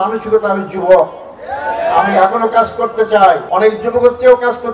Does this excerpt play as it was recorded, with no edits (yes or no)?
yes